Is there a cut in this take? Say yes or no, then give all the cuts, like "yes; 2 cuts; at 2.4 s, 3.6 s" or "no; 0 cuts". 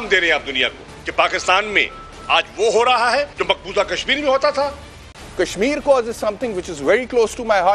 yes; 1 cut; at 5.1 s